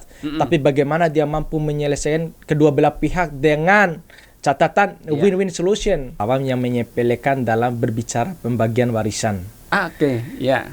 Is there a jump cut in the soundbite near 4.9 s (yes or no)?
no